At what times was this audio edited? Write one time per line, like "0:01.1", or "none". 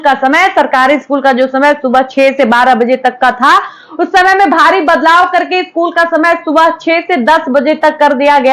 none

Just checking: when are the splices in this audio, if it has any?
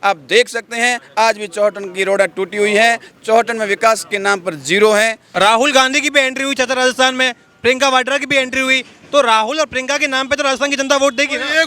0:05.2

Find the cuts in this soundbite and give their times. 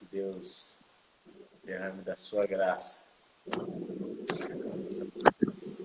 none

